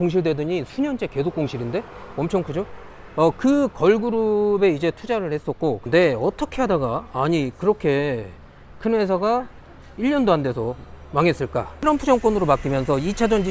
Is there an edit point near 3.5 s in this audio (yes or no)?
no